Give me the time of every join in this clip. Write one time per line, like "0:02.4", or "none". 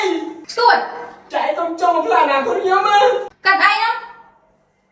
0:03.3